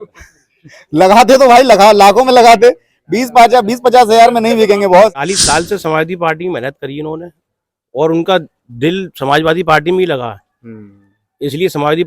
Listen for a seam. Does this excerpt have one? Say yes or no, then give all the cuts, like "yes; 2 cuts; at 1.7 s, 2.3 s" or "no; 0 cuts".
yes; 1 cut; at 5.3 s